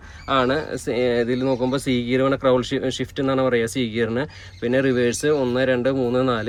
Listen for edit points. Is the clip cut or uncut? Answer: uncut